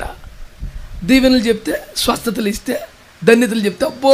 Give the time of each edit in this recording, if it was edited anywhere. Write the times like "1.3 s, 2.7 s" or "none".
none